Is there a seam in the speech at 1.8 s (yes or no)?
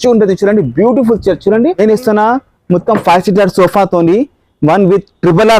yes